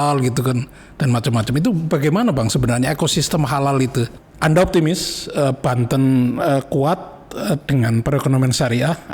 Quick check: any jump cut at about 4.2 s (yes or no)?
yes